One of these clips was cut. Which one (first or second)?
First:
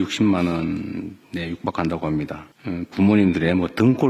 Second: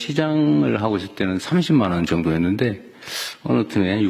first